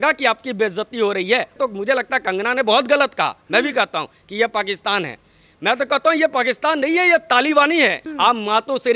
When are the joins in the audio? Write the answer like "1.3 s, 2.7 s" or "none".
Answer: 1.6 s, 8.0 s